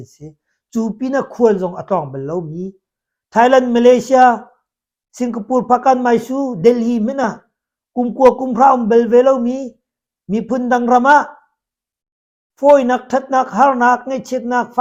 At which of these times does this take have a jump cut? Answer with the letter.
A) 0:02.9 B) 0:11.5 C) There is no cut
C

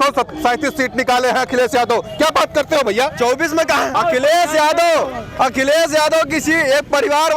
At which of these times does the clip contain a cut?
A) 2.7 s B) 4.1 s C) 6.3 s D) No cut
D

